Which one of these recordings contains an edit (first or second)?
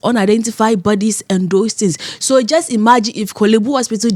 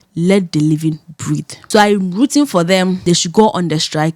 second